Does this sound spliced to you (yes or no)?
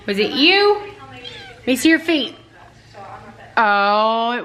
no